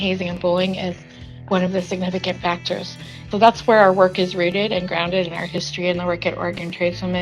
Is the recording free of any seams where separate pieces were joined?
no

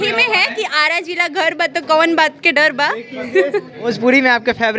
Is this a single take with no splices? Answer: no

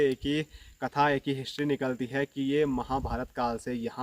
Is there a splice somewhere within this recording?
no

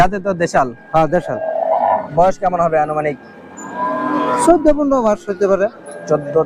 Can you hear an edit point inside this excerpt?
no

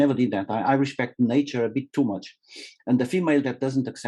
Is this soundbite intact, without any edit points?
yes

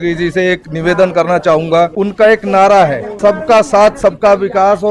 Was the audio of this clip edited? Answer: yes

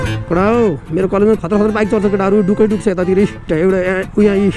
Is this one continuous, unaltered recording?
no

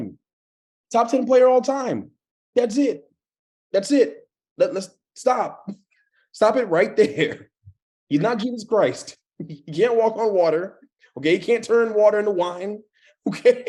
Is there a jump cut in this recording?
no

